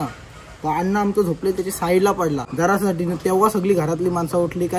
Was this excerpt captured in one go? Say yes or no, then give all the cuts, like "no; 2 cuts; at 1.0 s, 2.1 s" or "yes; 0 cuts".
no; 1 cut; at 2.5 s